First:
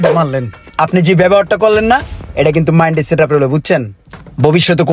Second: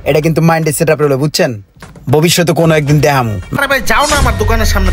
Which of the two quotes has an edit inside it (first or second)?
second